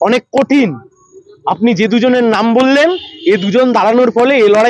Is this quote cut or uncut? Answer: uncut